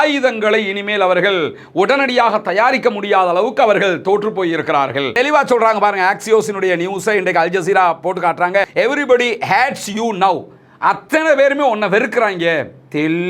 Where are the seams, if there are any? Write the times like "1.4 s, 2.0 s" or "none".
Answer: 5.2 s